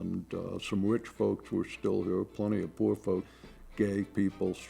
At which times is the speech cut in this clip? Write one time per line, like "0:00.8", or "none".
0:03.3